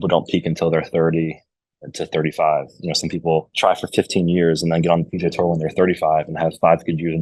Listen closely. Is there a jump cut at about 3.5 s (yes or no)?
yes